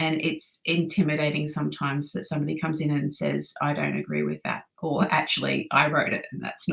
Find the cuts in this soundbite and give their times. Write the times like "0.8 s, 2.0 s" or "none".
none